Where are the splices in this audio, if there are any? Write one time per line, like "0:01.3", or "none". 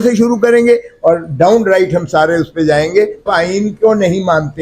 0:03.3